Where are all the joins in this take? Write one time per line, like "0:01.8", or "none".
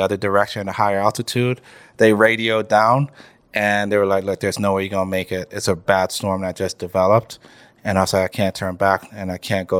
none